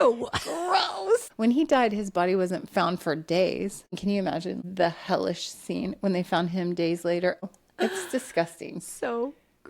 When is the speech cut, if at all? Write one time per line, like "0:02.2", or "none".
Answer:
0:01.3
0:04.1
0:07.4